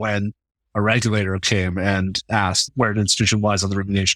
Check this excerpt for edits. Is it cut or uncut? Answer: cut